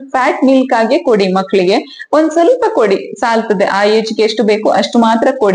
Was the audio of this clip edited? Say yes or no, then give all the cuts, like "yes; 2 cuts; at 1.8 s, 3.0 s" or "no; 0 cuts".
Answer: no; 0 cuts